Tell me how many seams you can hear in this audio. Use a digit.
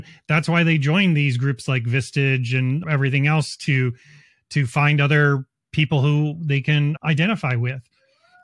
1